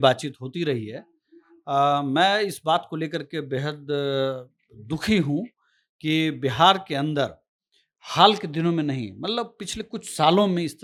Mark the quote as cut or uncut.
uncut